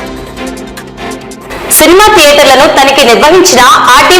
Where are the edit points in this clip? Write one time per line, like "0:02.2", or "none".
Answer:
0:01.2